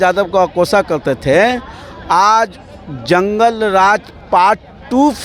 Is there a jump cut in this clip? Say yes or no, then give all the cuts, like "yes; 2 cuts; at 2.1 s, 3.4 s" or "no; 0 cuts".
no; 0 cuts